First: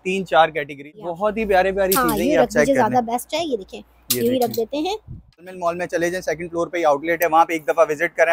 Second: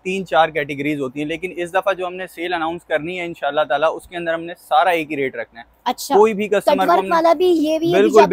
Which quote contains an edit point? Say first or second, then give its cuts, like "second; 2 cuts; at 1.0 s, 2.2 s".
first; 2 cuts; at 0.9 s, 5.5 s